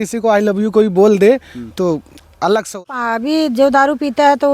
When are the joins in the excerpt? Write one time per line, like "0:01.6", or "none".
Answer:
0:02.9